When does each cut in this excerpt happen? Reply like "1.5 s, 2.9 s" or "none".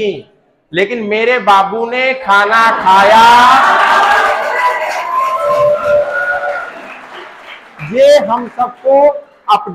none